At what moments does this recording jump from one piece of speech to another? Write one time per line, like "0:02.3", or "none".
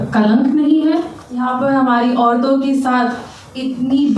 0:01.2